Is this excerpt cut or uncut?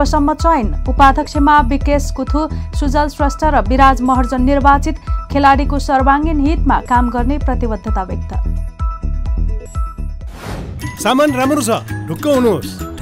cut